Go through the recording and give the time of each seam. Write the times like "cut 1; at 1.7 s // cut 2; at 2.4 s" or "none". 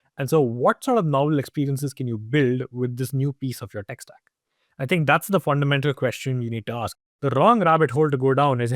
cut 1; at 7.0 s